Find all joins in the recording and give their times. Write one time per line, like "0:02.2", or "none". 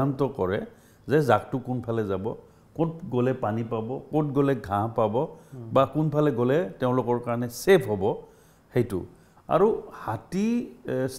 none